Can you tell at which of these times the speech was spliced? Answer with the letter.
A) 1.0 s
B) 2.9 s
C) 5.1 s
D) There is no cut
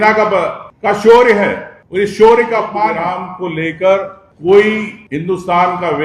B